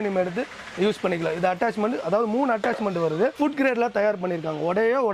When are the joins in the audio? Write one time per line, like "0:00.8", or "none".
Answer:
0:03.3